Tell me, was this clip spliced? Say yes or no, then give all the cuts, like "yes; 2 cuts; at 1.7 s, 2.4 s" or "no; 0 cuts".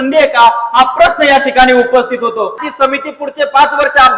yes; 1 cut; at 2.6 s